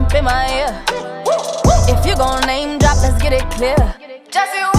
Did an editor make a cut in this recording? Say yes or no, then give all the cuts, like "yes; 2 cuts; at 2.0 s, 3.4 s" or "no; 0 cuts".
no; 0 cuts